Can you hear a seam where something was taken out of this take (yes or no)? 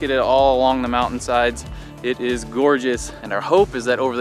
no